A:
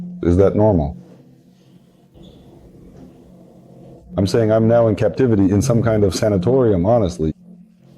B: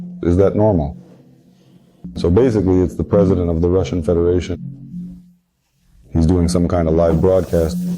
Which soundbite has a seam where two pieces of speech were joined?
B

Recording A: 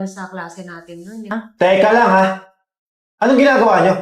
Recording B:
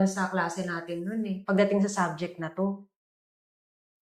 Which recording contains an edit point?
A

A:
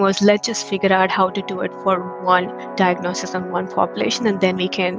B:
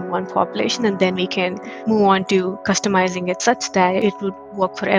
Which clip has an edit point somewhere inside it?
B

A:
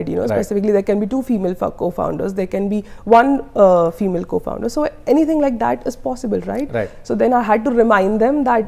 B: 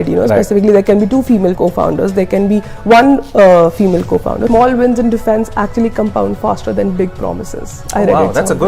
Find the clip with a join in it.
B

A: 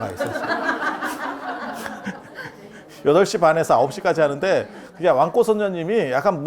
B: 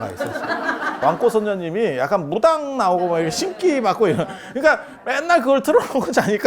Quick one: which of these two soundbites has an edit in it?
B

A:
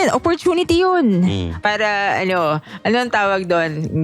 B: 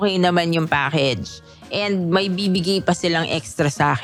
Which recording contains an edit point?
A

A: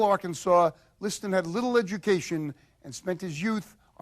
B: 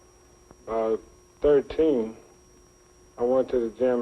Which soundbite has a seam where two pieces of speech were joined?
B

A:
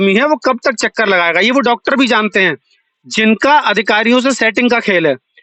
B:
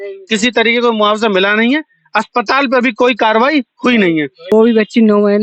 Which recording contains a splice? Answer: B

